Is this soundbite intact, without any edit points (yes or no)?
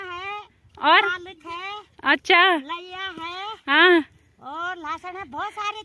yes